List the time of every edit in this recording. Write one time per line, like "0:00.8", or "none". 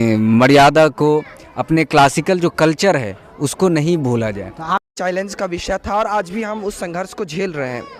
0:04.9